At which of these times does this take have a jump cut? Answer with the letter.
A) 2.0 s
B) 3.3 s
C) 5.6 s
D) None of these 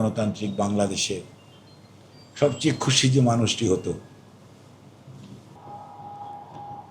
C